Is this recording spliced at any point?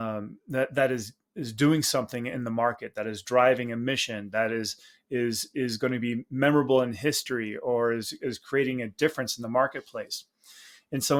no; 0 cuts

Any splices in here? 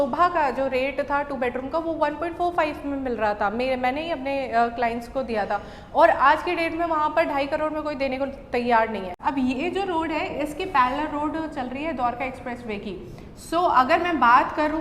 yes; 1 cut; at 9.1 s

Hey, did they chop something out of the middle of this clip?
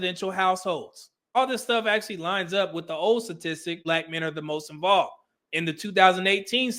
yes; 2 cuts; at 1.4 s, 3.8 s

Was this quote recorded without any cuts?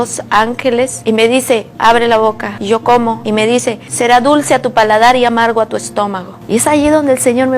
no; 4 cuts; at 1.0 s, 2.5 s, 3.4 s, 6.3 s

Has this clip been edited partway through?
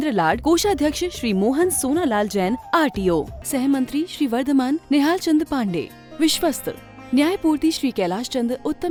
no; 0 cuts

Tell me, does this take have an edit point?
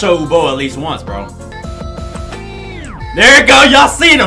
yes; 1 cut; at 1.5 s

